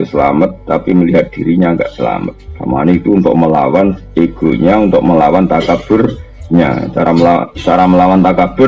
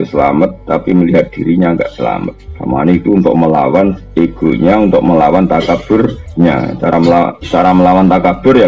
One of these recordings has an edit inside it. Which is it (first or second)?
second